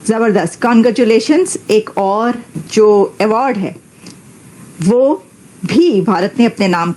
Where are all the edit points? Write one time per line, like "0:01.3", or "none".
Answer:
0:02.5